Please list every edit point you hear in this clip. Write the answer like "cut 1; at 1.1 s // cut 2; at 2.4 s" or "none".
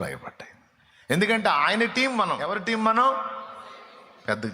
cut 1; at 1.2 s // cut 2; at 2.5 s

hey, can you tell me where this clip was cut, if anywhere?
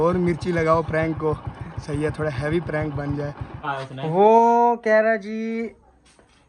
cut 1; at 3.6 s

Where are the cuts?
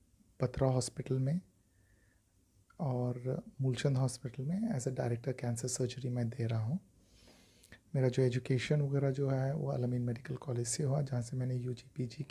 none

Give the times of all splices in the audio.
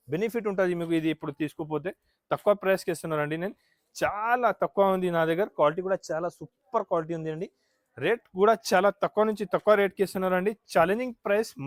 none

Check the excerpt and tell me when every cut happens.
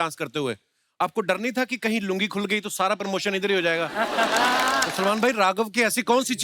cut 1; at 4.9 s

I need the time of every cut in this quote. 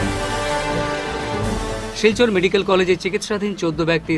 cut 1; at 1.3 s

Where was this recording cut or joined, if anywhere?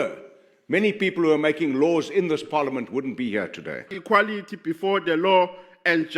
cut 1; at 3.9 s

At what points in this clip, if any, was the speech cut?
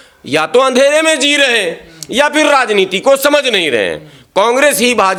none

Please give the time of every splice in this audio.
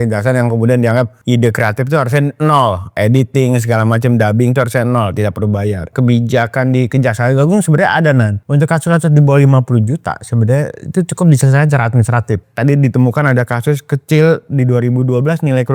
cut 1; at 1.2 s // cut 2; at 3.0 s // cut 3; at 5.9 s // cut 4; at 8.4 s // cut 5; at 12.4 s

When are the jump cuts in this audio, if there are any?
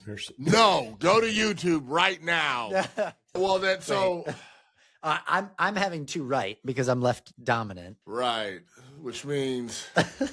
cut 1; at 3.4 s

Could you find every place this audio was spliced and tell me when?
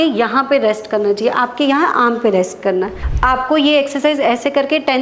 cut 1; at 3.0 s

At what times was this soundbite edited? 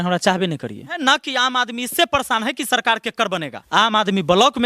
cut 1; at 1.0 s // cut 2; at 3.6 s

